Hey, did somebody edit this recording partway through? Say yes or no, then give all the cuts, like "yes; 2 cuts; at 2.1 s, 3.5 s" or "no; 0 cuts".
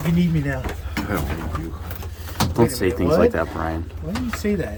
no; 0 cuts